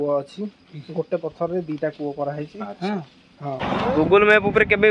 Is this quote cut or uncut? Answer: cut